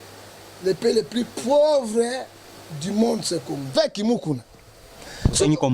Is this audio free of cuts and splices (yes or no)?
no